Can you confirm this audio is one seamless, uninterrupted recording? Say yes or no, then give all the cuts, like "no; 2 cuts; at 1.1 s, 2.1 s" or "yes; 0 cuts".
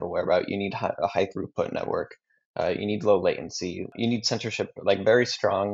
no; 1 cut; at 3.9 s